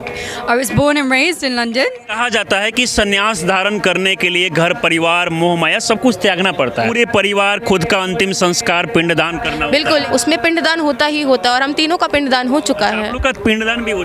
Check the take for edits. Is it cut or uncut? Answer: cut